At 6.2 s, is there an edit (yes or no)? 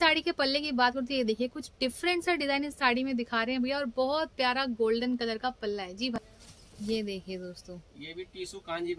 yes